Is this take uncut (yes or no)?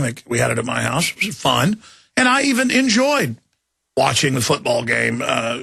yes